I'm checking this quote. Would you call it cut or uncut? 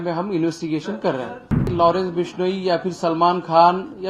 cut